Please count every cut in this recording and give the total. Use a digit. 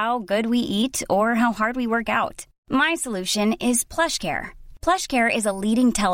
0